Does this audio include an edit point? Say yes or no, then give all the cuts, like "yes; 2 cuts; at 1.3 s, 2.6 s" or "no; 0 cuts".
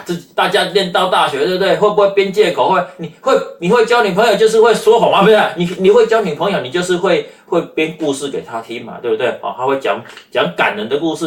no; 0 cuts